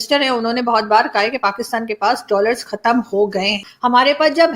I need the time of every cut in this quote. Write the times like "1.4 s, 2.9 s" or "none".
3.6 s